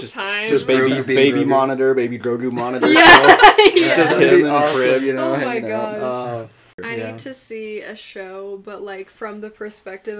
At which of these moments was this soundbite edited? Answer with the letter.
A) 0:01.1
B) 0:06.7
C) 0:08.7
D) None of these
B